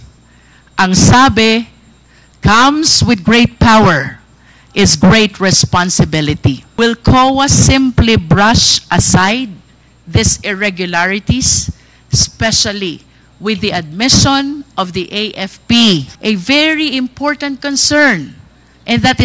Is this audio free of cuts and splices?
no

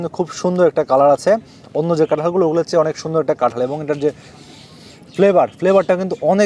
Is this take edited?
no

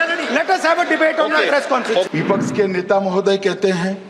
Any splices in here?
yes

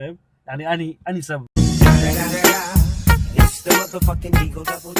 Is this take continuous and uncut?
yes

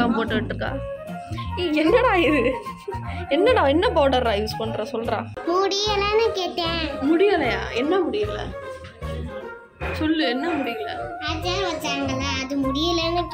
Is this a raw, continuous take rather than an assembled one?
no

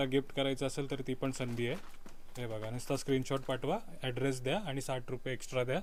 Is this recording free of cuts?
yes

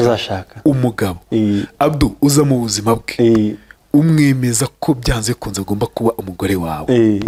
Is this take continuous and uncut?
yes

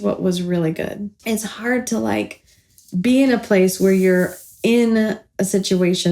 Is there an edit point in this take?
yes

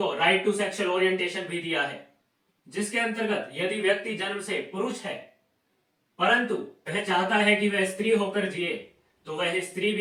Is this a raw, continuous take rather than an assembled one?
yes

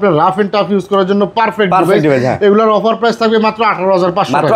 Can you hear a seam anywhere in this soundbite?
no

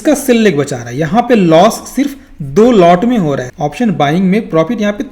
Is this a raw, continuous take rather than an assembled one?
no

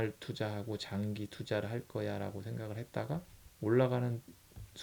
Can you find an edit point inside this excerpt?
yes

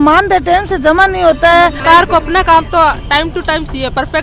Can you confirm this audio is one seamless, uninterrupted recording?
no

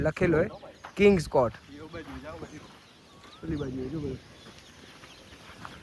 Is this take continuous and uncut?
yes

